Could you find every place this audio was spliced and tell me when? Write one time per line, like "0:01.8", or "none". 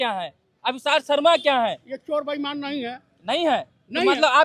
none